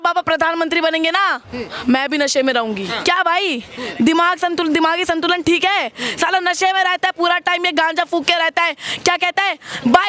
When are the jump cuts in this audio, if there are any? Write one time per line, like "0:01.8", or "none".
0:02.9

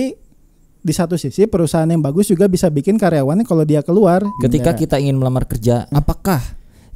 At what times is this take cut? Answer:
0:04.3
0:05.9

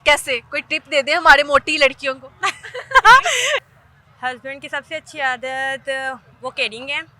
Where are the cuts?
0:03.7

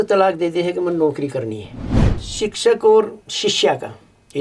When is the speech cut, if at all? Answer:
0:02.2

